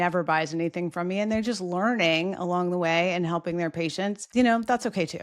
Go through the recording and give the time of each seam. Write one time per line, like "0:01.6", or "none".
0:04.2